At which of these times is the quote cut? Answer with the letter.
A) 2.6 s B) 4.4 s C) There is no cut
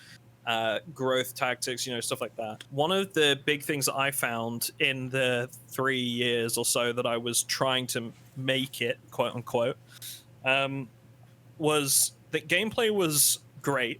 A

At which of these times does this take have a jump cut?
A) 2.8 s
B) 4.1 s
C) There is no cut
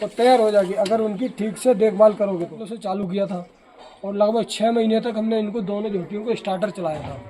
A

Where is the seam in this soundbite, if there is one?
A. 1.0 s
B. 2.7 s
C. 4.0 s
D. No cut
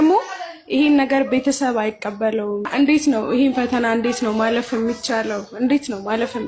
B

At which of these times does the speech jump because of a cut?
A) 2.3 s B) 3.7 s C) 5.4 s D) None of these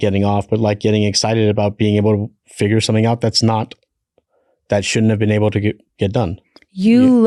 D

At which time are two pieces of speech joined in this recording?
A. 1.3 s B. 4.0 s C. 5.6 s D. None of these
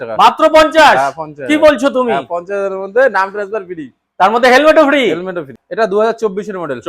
C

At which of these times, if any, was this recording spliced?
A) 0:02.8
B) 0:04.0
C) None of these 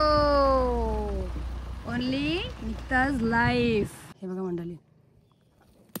B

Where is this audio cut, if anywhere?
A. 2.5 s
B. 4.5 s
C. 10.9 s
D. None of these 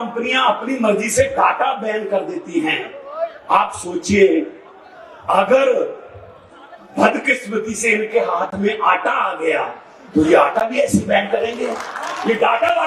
D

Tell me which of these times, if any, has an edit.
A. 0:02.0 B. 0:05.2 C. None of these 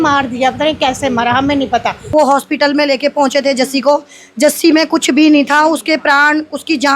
A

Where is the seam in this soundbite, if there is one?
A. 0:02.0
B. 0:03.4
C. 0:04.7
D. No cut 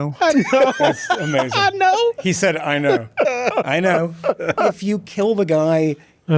C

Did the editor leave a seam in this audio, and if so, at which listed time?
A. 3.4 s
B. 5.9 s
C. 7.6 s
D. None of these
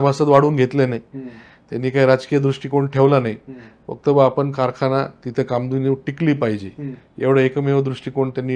D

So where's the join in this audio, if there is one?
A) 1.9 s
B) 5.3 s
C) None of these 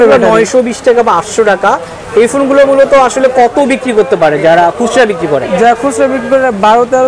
C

